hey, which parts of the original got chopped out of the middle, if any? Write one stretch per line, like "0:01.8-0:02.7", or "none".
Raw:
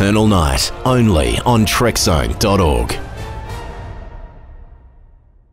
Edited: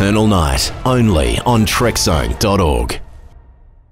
0:03.0-0:04.3